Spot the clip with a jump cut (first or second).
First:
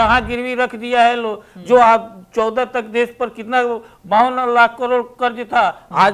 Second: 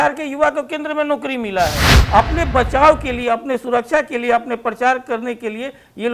second